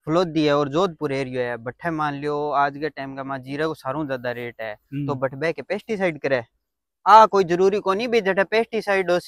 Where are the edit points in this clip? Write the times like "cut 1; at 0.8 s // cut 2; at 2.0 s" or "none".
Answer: none